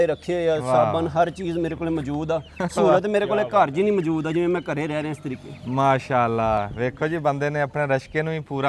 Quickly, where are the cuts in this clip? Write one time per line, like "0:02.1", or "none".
none